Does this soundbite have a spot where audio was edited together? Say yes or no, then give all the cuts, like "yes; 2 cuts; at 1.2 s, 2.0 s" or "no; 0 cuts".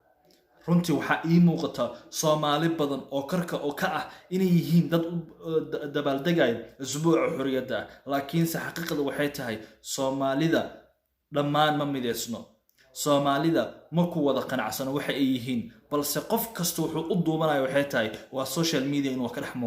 no; 0 cuts